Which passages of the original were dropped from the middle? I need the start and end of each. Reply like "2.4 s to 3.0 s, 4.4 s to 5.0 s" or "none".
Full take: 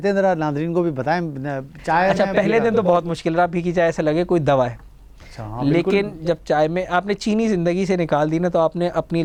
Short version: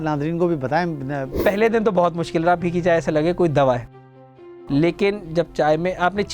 1.7 s to 2.3 s